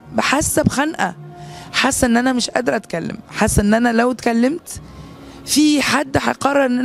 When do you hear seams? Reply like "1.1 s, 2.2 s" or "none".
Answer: none